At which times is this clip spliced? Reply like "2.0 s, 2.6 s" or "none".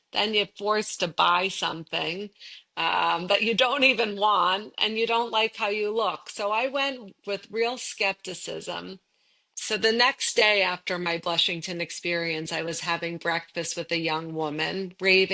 9.5 s